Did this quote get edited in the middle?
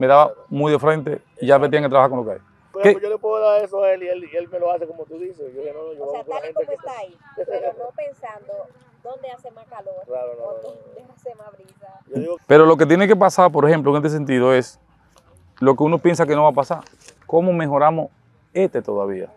yes; 2 cuts; at 2.6 s, 12.3 s

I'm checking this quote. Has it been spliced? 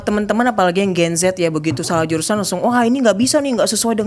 no; 0 cuts

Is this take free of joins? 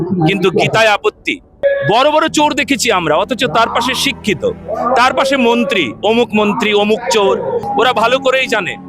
no; 2 cuts; at 1.6 s, 7.7 s

